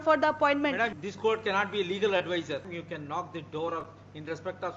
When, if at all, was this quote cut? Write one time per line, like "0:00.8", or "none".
0:00.9
0:02.7